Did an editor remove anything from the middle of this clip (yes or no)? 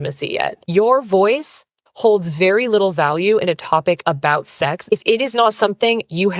no